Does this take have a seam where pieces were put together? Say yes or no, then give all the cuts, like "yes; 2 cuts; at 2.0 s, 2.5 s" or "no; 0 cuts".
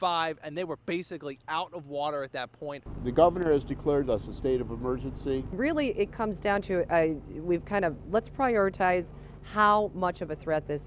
no; 0 cuts